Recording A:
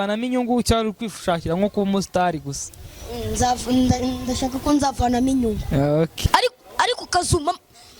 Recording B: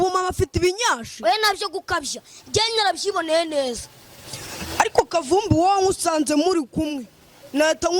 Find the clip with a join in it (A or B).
A